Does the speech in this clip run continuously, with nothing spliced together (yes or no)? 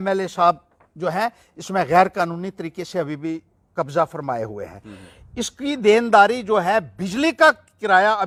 yes